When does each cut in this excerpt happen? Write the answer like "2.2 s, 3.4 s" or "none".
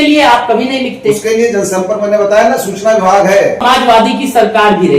3.9 s